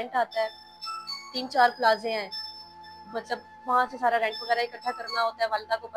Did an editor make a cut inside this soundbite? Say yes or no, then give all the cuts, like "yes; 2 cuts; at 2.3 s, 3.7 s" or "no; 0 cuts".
no; 0 cuts